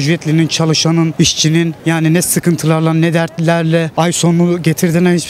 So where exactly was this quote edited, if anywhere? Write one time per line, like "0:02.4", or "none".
0:01.4
0:03.9